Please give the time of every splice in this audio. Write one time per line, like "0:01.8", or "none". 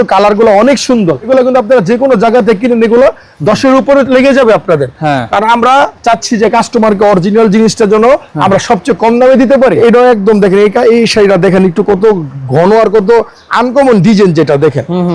0:01.3
0:09.8